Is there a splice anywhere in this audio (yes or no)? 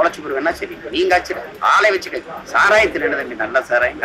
yes